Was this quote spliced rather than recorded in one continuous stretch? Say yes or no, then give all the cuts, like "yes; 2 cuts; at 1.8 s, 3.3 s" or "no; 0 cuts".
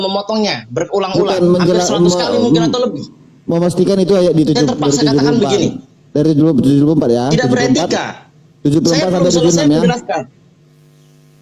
no; 0 cuts